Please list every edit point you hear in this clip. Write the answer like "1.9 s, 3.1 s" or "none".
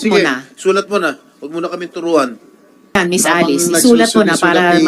3.0 s